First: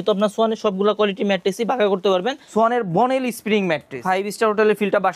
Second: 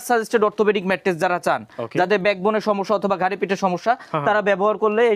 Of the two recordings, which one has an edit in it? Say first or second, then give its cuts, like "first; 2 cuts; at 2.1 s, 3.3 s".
first; 2 cuts; at 2.4 s, 4.0 s